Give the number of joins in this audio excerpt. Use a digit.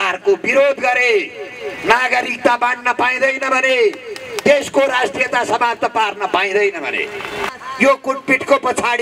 1